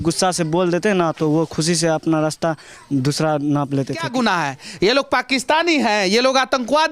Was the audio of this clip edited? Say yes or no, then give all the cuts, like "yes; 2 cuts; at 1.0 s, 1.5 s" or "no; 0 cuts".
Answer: yes; 1 cut; at 4.1 s